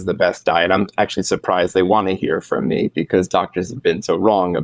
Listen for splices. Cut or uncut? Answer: uncut